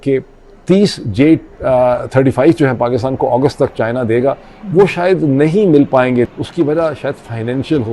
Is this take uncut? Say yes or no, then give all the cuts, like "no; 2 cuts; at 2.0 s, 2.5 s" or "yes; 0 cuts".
no; 1 cut; at 6.3 s